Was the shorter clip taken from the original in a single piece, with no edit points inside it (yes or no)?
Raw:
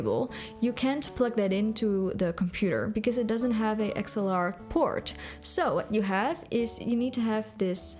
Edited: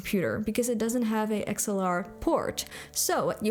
yes